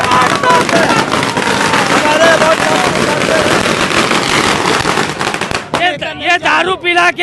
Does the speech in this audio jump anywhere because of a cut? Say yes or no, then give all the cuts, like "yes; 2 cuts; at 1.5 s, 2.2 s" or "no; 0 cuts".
yes; 1 cut; at 5.8 s